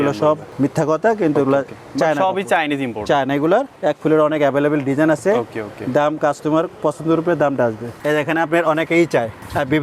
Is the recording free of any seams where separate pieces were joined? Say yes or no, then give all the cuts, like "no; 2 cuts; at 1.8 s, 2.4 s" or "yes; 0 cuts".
yes; 0 cuts